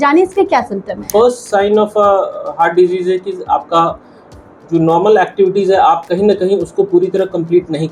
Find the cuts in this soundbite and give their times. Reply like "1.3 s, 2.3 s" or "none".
1.1 s